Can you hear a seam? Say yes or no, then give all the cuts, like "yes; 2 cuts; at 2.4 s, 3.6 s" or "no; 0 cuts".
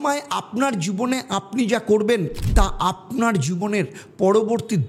no; 0 cuts